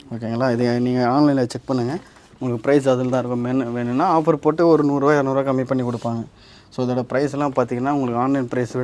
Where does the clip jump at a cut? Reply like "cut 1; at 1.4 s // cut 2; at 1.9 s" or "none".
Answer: none